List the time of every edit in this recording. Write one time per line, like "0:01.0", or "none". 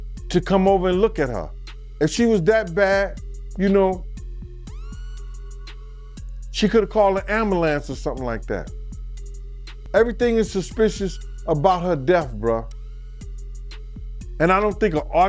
0:13.1
0:14.3